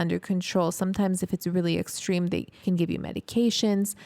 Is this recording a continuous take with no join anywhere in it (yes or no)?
no